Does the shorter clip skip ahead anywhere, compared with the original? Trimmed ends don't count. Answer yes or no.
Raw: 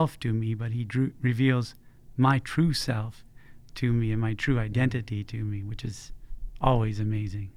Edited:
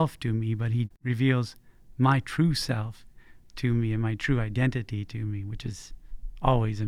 yes